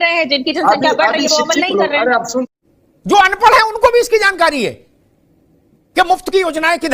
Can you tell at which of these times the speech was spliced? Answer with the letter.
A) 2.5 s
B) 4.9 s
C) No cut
A